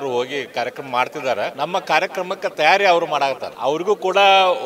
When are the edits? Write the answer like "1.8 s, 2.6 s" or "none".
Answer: 1.5 s, 3.5 s